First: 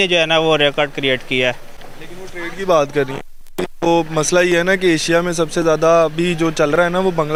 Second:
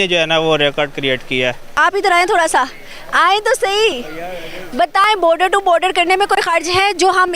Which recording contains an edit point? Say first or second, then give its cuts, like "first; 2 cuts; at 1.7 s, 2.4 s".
second; 1 cut; at 1.8 s